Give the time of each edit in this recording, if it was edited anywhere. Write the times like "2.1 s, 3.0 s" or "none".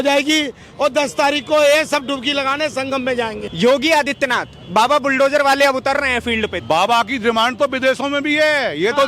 3.4 s, 6.6 s